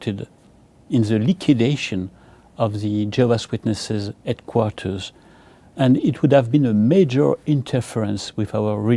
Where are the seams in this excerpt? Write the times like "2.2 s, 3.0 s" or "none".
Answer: none

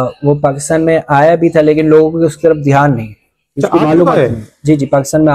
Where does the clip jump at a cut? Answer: none

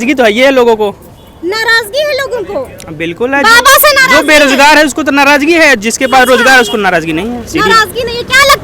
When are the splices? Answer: none

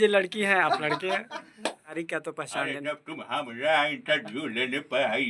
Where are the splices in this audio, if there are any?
1.9 s

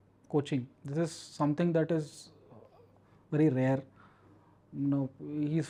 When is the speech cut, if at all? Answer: none

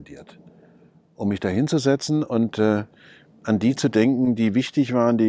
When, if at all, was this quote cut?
none

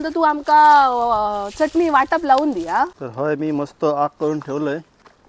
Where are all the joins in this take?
none

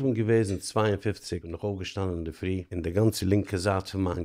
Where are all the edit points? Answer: 1.5 s, 2.7 s

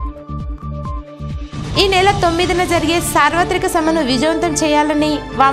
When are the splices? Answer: 1.2 s

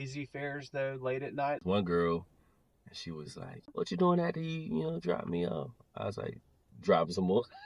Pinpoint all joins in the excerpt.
1.6 s, 3.7 s

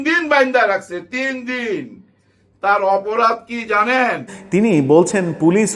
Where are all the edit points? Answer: 4.3 s

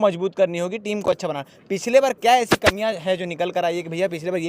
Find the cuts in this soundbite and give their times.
none

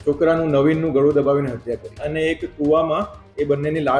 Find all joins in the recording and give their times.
2.0 s

